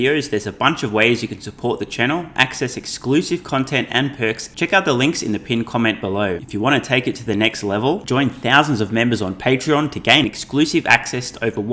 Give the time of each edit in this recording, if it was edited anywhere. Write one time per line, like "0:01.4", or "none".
0:04.5
0:06.4